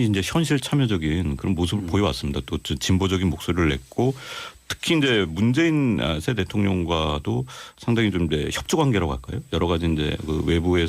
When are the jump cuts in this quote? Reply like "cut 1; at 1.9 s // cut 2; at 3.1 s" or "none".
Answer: cut 1; at 2.2 s